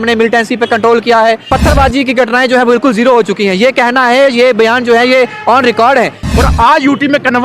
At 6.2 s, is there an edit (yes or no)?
yes